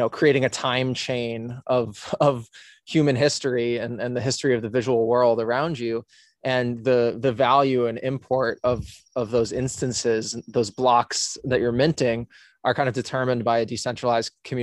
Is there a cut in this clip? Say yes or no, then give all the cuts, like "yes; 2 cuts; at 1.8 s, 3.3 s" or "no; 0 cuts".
no; 0 cuts